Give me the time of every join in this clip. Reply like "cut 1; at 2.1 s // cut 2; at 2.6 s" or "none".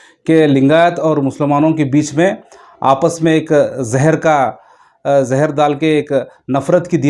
none